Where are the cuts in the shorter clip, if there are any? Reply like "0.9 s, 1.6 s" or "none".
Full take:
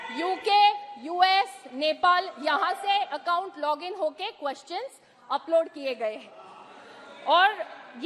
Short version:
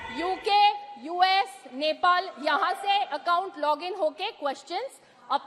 none